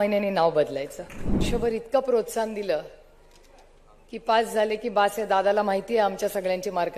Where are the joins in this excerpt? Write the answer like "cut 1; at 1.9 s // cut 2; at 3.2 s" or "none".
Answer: cut 1; at 1.5 s